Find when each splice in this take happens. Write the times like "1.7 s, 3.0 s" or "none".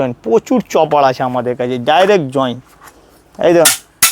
none

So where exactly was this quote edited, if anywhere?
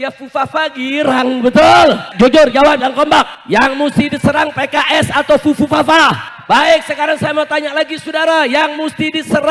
2.1 s, 3.4 s, 6.3 s

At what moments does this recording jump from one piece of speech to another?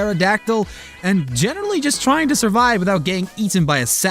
1.6 s

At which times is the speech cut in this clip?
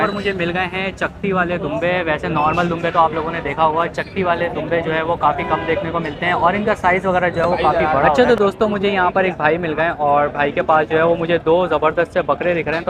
8.2 s

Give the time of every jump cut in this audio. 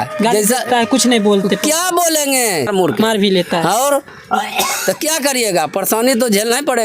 2.7 s

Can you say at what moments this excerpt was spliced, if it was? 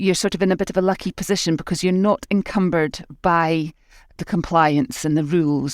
4.2 s

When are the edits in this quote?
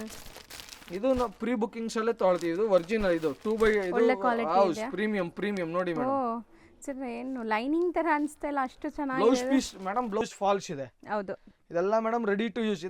10.2 s

